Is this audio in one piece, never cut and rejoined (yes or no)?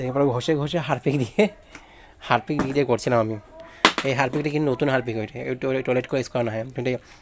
yes